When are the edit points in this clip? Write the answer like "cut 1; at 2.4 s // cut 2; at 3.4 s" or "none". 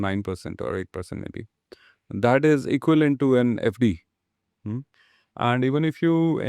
none